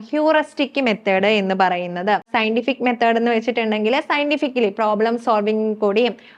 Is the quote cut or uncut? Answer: cut